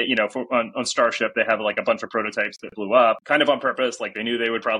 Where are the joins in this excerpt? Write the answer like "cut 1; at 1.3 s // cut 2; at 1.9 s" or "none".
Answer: cut 1; at 3.2 s